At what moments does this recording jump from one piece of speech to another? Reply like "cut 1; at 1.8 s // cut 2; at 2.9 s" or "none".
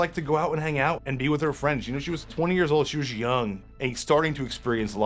cut 1; at 1.0 s // cut 2; at 2.3 s // cut 3; at 3.6 s